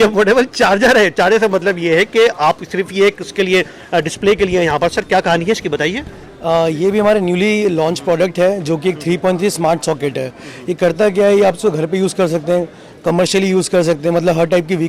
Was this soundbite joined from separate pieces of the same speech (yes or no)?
no